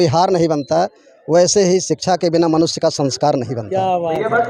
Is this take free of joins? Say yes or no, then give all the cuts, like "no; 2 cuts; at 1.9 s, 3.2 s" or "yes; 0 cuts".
yes; 0 cuts